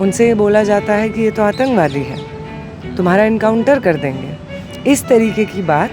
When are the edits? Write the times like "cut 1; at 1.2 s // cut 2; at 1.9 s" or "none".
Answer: none

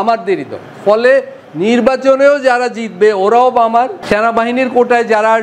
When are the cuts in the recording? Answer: cut 1; at 4.0 s

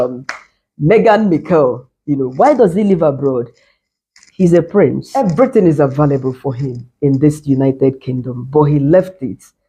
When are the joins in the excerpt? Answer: cut 1; at 5.1 s

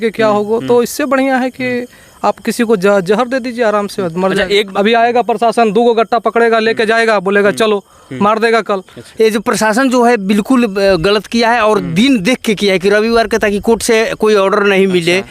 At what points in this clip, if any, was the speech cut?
cut 1; at 4.7 s // cut 2; at 9.0 s

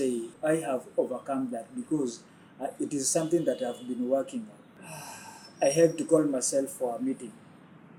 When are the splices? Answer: none

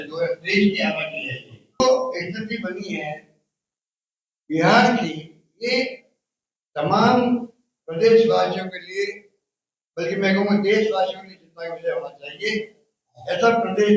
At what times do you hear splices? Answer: cut 1; at 1.8 s

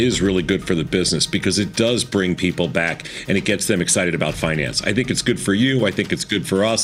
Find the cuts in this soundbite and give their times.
none

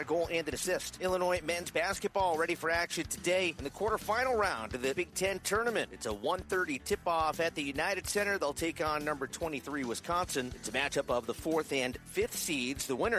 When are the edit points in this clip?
cut 1; at 0.9 s

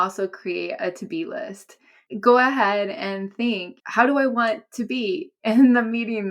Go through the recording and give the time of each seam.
cut 1; at 1.9 s // cut 2; at 3.8 s

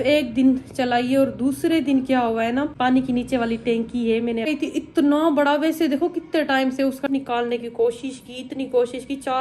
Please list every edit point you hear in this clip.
cut 1; at 2.7 s // cut 2; at 4.5 s // cut 3; at 7.1 s

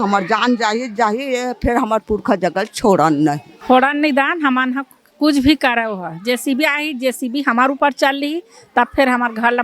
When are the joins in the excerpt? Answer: cut 1; at 3.5 s

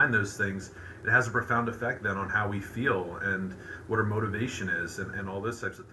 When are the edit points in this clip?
none

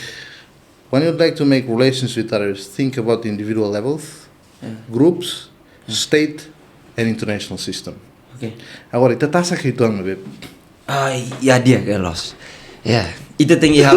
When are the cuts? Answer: none

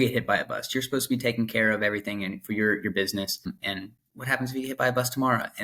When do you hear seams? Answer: cut 1; at 3.5 s

